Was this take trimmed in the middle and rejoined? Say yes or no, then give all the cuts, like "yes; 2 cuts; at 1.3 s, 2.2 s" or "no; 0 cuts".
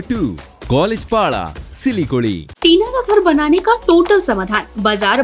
yes; 1 cut; at 2.5 s